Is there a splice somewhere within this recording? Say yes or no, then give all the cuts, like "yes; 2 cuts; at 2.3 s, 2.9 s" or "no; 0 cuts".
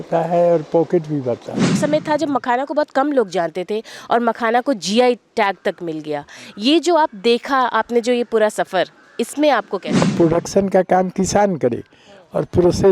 yes; 2 cuts; at 1.7 s, 10.0 s